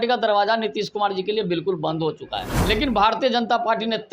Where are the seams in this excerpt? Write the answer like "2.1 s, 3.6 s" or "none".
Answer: 2.5 s